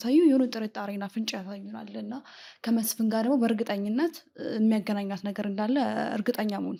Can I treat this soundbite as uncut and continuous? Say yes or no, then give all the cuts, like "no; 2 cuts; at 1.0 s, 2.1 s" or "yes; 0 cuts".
yes; 0 cuts